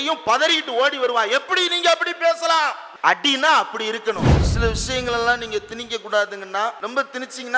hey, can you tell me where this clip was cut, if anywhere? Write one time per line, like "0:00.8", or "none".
0:02.9
0:04.4
0:06.8